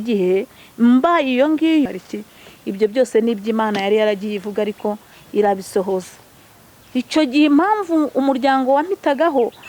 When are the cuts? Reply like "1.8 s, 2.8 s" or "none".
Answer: 1.9 s